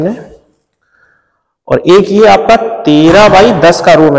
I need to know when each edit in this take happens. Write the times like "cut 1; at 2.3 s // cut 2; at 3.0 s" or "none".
none

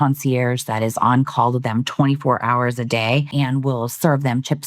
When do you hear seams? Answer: cut 1; at 3.3 s

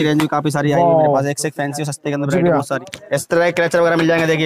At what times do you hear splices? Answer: cut 1; at 2.8 s

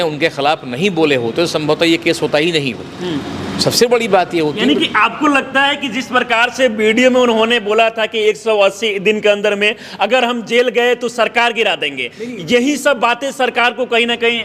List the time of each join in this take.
none

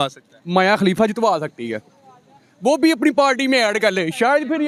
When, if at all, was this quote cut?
none

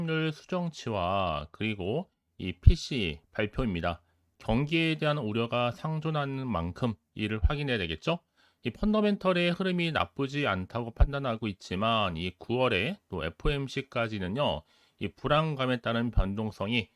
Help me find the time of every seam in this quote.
cut 1; at 3.2 s

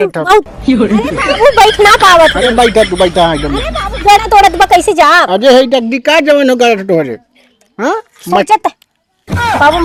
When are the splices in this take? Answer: none

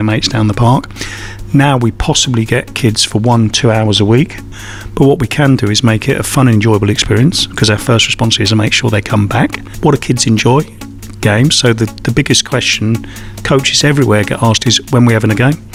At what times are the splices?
cut 1; at 4.5 s // cut 2; at 9.6 s

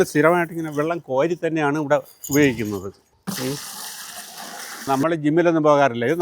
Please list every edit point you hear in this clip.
cut 1; at 3.1 s // cut 2; at 4.9 s

